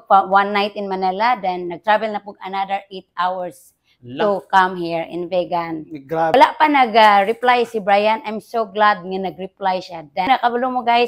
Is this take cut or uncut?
cut